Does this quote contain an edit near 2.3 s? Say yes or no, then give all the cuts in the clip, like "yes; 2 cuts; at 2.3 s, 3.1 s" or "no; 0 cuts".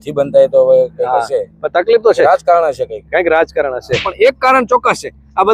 no; 1 cut; at 4.1 s